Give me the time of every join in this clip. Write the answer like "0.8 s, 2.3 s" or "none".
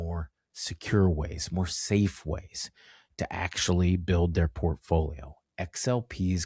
none

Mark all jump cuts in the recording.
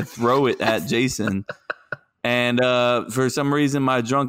none

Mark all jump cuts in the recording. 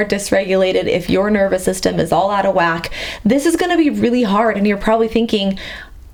none

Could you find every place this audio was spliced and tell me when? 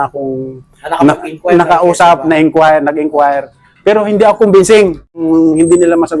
5.2 s

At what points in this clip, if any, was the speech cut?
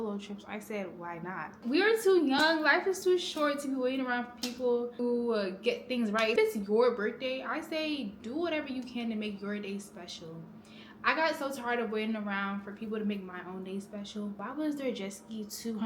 1.6 s, 5.0 s, 6.3 s, 14.4 s

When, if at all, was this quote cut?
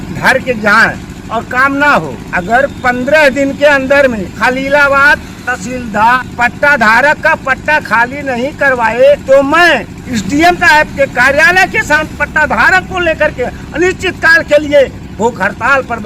1.1 s, 2.2 s, 4.3 s, 6.2 s, 9.2 s, 10.0 s, 12.0 s

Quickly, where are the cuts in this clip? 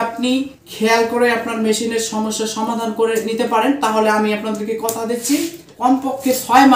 5.6 s

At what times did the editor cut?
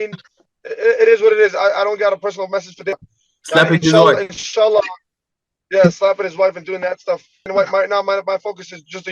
3.0 s, 7.5 s

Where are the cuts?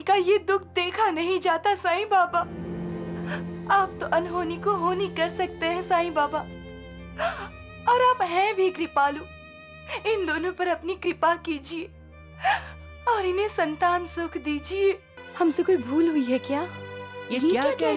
2.6 s, 15.2 s

